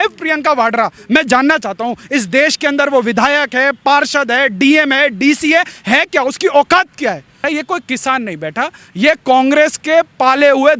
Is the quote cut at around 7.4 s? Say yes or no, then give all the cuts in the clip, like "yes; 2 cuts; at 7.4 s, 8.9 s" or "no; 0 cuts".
yes; 1 cut; at 7.4 s